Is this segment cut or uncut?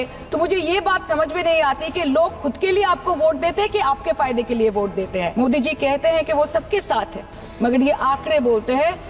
cut